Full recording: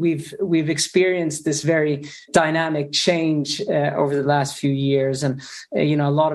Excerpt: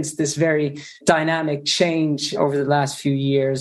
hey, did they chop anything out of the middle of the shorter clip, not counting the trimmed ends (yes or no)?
yes